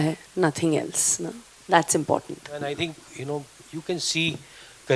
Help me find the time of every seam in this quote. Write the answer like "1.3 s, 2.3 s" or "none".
none